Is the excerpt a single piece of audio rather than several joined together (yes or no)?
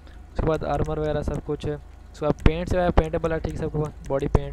yes